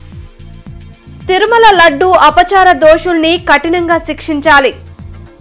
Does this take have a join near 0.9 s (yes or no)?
yes